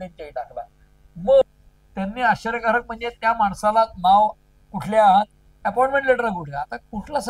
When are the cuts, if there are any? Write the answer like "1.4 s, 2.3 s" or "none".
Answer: 1.4 s